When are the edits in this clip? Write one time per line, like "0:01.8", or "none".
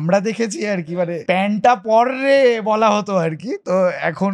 0:01.2